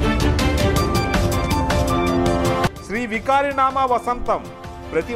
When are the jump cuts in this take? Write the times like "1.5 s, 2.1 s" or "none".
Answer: 0.7 s, 2.6 s